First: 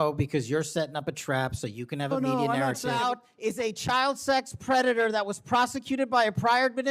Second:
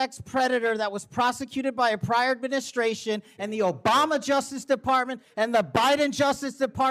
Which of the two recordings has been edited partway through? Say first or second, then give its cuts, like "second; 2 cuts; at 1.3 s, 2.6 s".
first; 1 cut; at 3.0 s